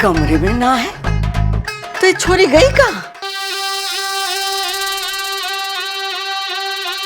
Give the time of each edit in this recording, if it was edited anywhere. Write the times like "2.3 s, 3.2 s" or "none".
3.2 s